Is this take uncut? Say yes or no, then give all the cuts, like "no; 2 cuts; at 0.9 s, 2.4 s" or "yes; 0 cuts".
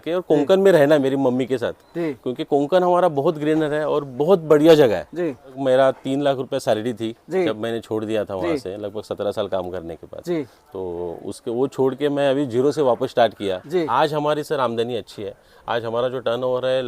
no; 2 cuts; at 5.6 s, 13.9 s